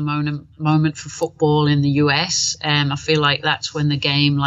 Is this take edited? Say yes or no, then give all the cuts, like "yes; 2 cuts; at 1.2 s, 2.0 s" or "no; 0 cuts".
no; 0 cuts